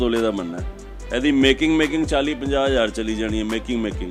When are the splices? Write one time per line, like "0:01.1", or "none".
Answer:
none